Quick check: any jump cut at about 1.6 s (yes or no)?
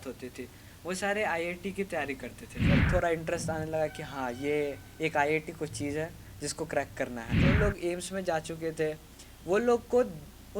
no